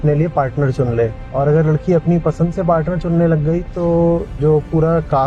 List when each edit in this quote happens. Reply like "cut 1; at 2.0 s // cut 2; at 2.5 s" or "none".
cut 1; at 1.2 s